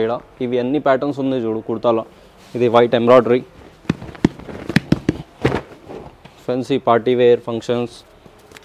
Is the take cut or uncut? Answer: uncut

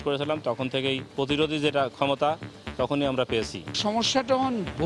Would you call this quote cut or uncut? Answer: cut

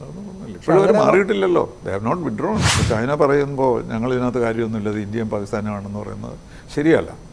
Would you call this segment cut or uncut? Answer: cut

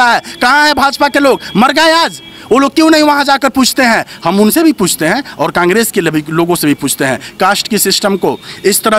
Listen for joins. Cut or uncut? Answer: uncut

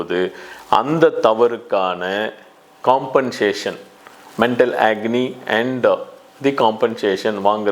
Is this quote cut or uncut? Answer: uncut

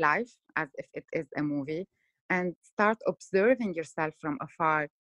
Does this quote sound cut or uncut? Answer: cut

